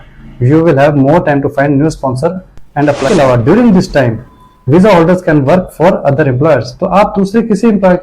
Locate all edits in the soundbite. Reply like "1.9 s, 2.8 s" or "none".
3.1 s